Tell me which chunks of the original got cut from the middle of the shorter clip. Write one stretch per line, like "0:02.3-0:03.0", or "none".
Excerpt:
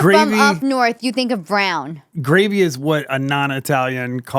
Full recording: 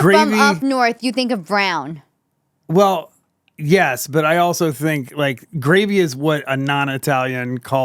0:02.1-0:05.5